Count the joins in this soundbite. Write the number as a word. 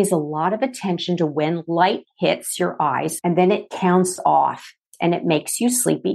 two